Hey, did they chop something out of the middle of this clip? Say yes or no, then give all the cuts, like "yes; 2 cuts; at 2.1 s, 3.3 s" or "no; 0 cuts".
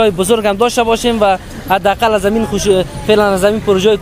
no; 0 cuts